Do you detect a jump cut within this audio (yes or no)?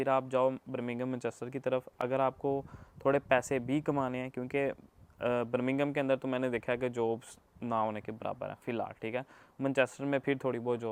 no